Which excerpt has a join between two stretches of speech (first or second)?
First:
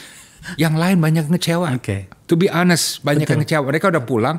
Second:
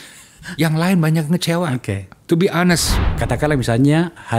second